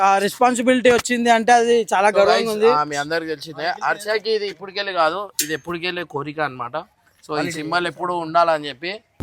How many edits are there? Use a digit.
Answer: 0